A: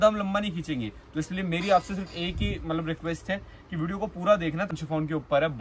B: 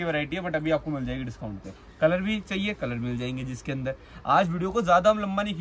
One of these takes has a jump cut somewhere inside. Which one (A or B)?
A